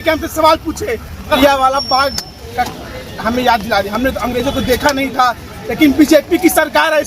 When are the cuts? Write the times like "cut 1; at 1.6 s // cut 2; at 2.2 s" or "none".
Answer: cut 1; at 1.4 s